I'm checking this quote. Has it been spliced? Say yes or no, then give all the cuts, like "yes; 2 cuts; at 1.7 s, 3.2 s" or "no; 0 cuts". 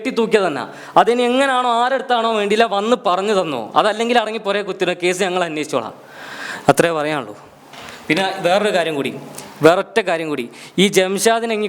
no; 0 cuts